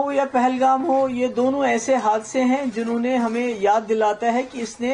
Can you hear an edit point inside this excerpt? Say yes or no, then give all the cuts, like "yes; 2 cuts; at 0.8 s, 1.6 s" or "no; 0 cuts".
no; 0 cuts